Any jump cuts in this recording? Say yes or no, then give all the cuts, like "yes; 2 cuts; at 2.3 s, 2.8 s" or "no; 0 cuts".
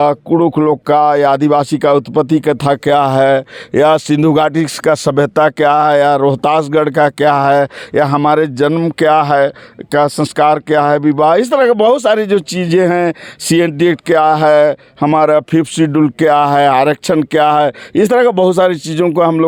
no; 0 cuts